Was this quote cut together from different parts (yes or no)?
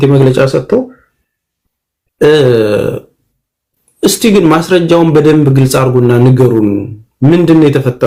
no